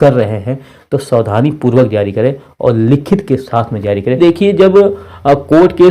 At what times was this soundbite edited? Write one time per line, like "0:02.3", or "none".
0:04.2